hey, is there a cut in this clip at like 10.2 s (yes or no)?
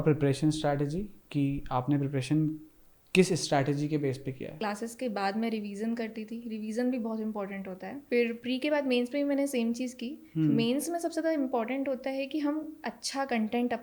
no